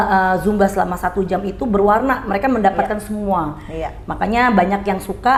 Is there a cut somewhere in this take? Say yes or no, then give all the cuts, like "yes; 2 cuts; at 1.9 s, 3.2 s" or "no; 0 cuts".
no; 0 cuts